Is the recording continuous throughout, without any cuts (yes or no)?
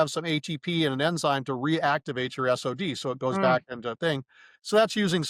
yes